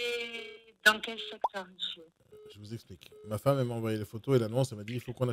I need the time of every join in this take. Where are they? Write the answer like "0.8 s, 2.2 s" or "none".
2.2 s